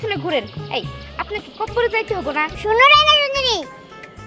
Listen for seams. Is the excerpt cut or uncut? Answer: cut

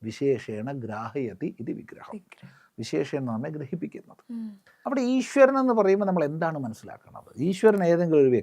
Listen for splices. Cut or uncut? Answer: cut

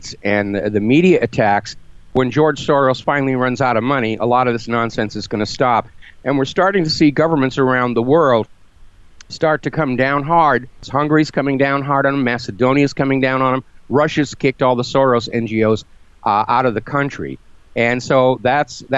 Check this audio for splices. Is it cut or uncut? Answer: cut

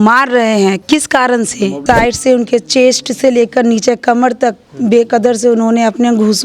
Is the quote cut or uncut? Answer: cut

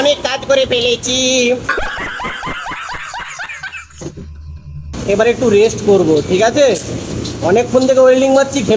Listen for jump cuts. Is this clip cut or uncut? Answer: uncut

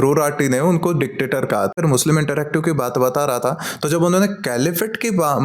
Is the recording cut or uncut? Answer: cut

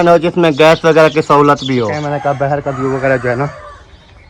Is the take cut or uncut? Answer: cut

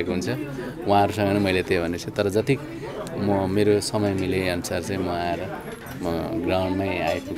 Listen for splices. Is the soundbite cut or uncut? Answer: uncut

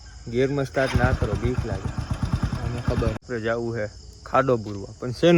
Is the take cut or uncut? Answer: cut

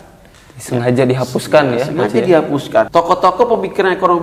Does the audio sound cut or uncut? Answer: cut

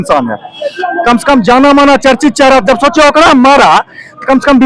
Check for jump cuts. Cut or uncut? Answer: uncut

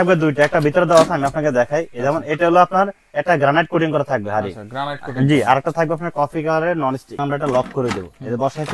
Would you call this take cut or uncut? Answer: cut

